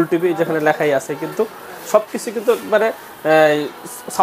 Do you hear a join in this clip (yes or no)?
no